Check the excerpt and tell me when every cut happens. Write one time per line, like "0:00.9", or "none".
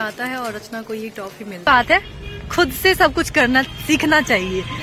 0:01.7